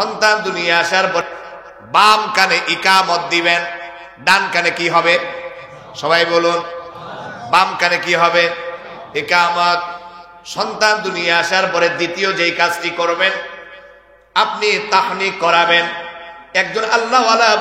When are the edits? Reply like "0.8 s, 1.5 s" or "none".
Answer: 1.2 s